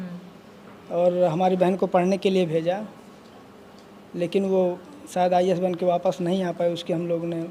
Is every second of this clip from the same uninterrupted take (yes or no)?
yes